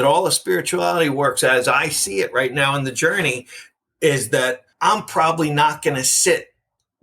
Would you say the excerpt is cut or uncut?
cut